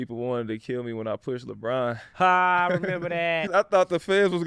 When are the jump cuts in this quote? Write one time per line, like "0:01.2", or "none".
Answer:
0:03.5